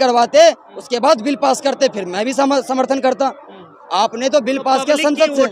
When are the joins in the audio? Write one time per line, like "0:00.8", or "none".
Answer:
none

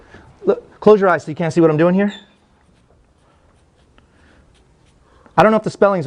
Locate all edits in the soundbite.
none

